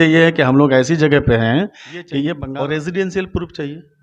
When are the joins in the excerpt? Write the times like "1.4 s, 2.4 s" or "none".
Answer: 2.4 s